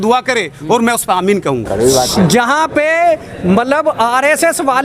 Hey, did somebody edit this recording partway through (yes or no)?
yes